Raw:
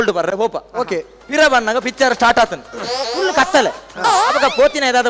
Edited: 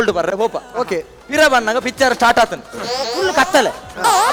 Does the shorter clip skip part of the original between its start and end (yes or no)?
no